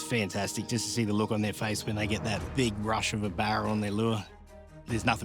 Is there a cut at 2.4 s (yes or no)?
no